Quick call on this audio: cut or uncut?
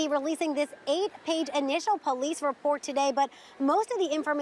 uncut